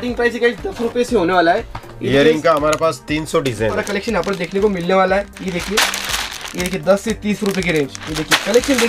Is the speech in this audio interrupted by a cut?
yes; 1 cut; at 3.8 s

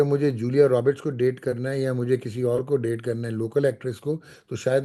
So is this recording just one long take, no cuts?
yes; 0 cuts

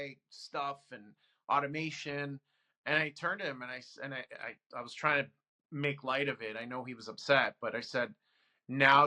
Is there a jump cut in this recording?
no; 0 cuts

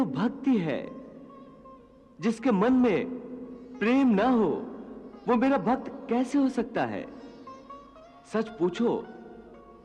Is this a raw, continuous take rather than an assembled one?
yes; 0 cuts

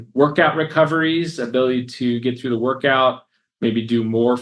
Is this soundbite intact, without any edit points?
yes; 0 cuts

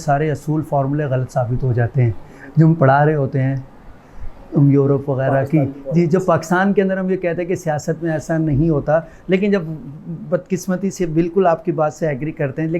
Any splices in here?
no; 0 cuts

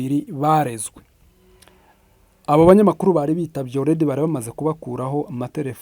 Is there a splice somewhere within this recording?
yes; 1 cut; at 1.2 s

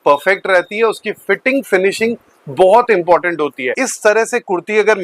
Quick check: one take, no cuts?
no; 1 cut; at 3.8 s

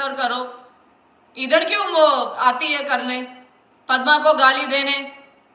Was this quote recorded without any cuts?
yes; 0 cuts

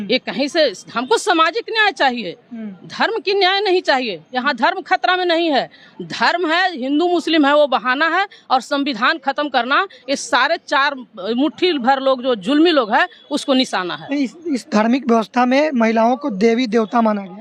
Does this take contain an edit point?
no; 0 cuts

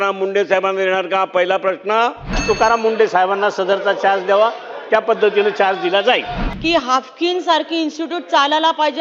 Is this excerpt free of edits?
no; 2 cuts; at 2.4 s, 6.4 s

